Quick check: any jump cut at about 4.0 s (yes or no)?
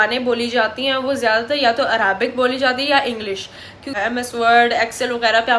yes